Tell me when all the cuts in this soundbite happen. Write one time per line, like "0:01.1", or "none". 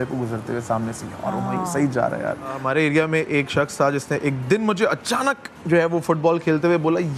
0:02.6